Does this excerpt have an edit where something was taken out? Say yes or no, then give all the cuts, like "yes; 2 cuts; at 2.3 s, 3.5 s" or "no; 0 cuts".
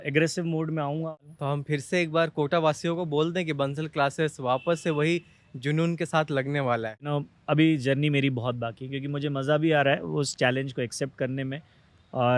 yes; 2 cuts; at 1.1 s, 7.1 s